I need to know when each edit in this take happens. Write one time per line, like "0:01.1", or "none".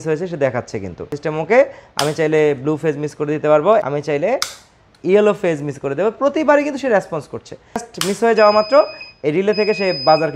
0:01.2
0:03.8
0:07.8